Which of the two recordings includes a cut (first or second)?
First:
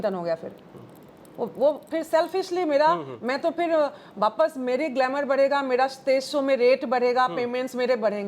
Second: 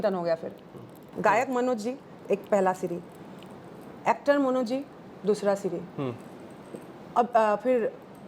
second